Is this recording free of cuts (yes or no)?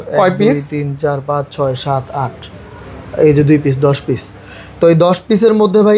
yes